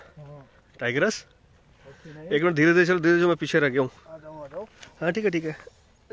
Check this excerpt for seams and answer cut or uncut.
uncut